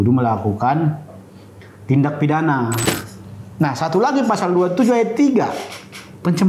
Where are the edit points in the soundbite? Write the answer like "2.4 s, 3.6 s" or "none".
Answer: 2.8 s